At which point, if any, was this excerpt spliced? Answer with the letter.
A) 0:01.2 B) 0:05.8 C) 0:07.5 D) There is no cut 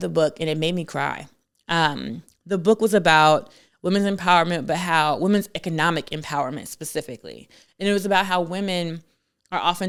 D